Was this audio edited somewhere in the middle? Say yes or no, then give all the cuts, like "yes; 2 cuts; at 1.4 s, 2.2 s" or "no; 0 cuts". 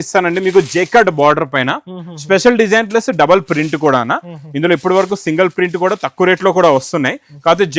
no; 0 cuts